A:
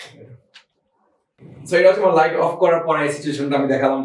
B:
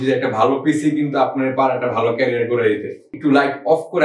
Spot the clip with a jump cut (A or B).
B